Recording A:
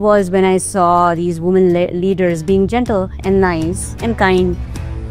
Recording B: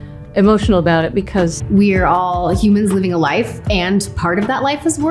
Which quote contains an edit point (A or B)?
B